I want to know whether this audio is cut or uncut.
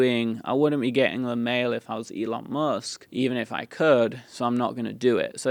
cut